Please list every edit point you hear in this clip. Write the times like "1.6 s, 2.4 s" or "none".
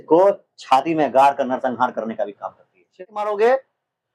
3.0 s